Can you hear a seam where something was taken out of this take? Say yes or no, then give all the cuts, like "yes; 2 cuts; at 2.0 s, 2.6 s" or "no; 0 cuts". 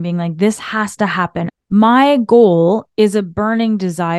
yes; 1 cut; at 1.5 s